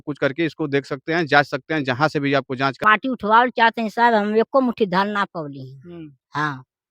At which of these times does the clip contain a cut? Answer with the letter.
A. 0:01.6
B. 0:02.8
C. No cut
B